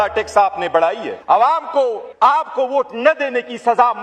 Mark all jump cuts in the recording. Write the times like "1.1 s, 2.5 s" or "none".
1.1 s, 2.0 s